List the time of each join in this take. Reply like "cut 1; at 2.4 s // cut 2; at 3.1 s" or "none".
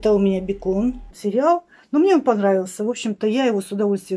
cut 1; at 1.1 s